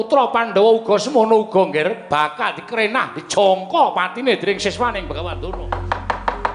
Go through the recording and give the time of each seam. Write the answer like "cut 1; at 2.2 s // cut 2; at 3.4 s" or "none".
cut 1; at 5.2 s